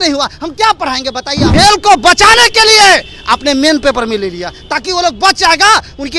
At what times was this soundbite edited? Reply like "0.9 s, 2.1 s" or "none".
1.5 s